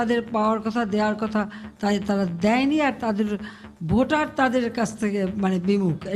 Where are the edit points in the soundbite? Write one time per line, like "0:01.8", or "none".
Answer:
none